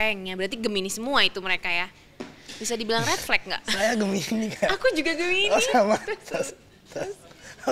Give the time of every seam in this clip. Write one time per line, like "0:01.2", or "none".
none